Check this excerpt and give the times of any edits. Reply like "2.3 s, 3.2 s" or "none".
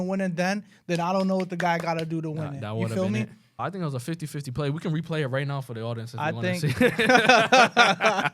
3.5 s